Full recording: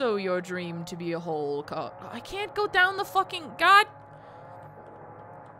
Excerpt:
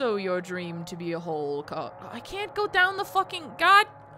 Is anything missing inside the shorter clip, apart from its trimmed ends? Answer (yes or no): no